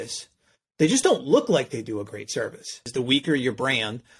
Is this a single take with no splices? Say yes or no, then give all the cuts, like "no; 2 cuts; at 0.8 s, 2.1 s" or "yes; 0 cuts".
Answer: no; 1 cut; at 2.8 s